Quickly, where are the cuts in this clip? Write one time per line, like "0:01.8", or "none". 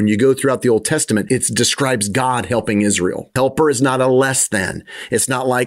0:01.2
0:03.2